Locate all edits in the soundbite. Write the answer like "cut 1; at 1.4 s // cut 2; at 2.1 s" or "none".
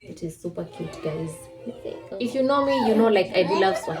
cut 1; at 2.0 s